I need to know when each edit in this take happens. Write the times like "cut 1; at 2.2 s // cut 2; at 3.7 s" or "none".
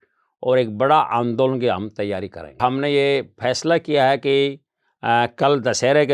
cut 1; at 2.6 s